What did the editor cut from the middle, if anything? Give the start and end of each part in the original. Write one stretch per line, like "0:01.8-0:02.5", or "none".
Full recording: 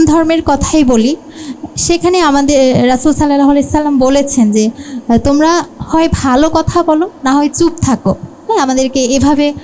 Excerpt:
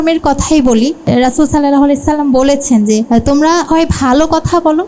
0:01.3-0:02.7
0:05.1-0:05.6